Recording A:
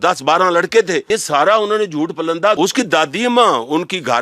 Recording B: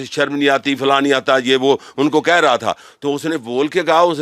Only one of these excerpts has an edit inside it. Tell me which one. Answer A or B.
A